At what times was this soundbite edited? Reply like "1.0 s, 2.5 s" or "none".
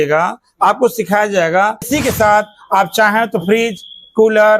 1.9 s